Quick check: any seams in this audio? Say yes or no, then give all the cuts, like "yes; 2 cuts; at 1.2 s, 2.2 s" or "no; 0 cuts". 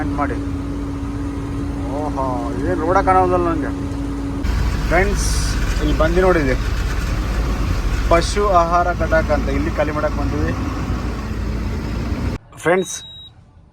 yes; 2 cuts; at 4.4 s, 12.4 s